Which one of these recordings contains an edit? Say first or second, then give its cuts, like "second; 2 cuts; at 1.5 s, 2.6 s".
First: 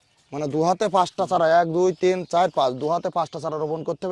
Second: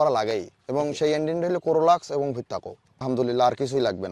second; 1 cut; at 3.0 s